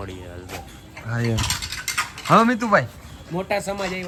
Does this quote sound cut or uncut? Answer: uncut